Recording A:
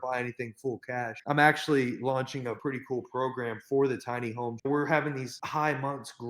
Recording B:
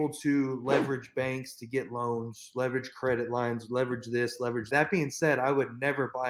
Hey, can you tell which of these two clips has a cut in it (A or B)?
A